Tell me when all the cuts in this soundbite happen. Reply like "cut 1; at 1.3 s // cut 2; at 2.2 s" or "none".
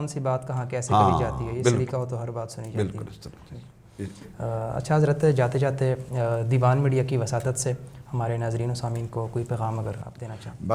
none